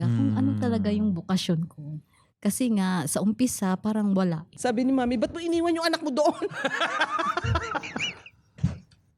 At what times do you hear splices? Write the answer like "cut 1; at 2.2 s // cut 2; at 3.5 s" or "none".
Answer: cut 1; at 4.5 s